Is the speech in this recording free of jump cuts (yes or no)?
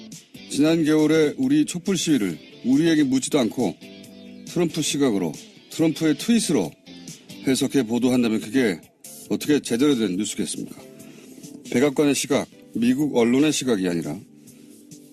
no